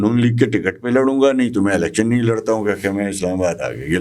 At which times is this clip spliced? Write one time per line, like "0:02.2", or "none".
none